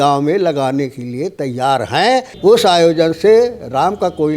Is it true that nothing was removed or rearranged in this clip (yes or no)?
no